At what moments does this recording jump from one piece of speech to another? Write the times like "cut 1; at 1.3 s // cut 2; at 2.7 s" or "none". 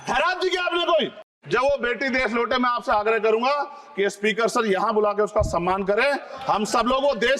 cut 1; at 1.3 s